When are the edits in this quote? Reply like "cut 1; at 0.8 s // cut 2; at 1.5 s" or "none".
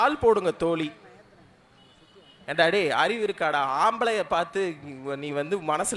none